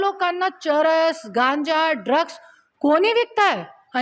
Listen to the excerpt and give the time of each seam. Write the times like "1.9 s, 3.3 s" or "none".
none